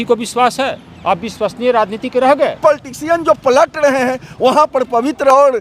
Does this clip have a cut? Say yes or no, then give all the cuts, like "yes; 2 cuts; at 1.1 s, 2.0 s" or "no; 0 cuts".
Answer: yes; 1 cut; at 2.6 s